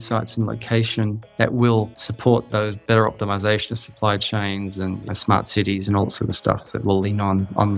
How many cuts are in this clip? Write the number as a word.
two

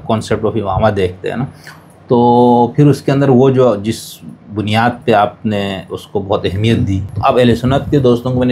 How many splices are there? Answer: one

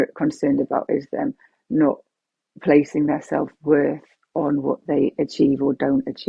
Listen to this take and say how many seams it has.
zero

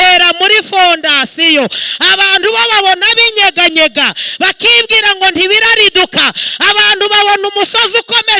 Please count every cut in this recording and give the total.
zero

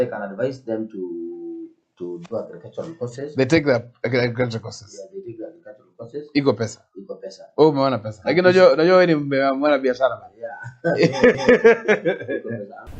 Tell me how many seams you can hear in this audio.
one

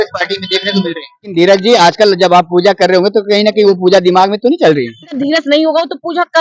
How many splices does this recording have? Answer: two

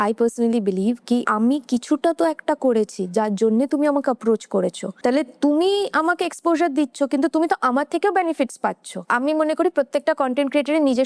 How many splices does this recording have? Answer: three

